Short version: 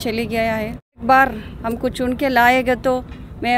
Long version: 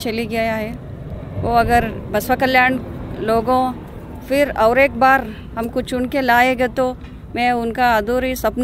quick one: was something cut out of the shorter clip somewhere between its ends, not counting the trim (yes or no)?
yes